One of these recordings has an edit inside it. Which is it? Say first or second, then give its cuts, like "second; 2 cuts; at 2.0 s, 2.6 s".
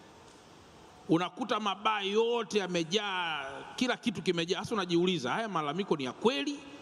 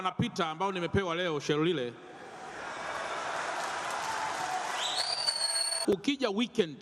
second; 1 cut; at 5.8 s